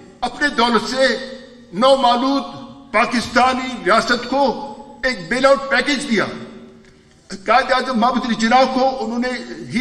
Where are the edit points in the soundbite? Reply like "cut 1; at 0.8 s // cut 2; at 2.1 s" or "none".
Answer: none